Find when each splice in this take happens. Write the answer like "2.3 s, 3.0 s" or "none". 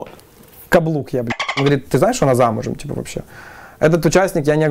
1.6 s